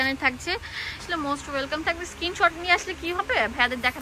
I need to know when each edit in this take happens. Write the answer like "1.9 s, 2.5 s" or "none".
1.0 s